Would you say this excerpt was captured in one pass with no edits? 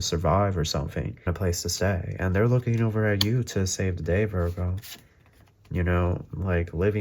no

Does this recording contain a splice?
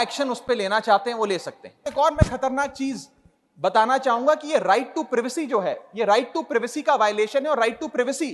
yes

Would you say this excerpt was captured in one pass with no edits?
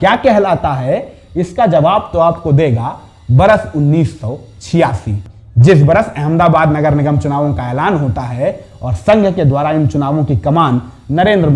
yes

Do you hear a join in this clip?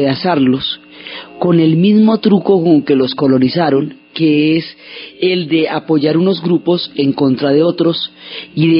yes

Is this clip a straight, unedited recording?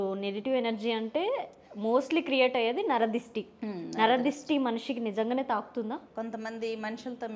no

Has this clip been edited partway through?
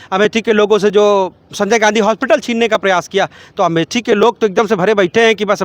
no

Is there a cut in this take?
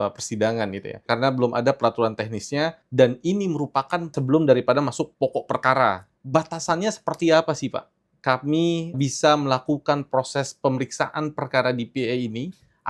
yes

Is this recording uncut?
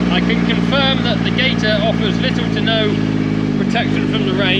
yes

